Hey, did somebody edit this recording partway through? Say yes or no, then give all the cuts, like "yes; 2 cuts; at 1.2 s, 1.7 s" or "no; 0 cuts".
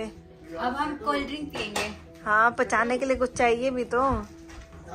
no; 0 cuts